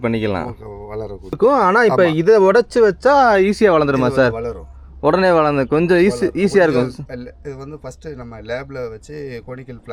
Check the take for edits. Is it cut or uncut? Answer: cut